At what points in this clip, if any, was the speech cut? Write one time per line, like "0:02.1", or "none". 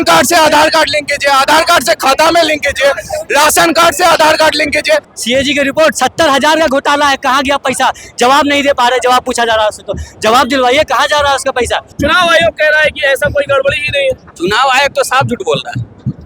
0:05.1
0:11.9